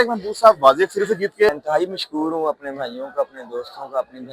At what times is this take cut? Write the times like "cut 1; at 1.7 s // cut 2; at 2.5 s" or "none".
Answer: cut 1; at 1.5 s